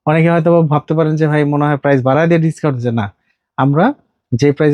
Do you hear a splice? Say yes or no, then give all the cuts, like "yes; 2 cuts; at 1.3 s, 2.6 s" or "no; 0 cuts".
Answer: no; 0 cuts